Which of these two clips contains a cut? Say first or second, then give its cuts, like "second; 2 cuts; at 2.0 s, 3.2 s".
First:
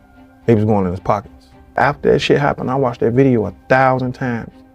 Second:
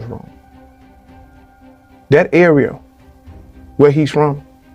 first; 1 cut; at 1.8 s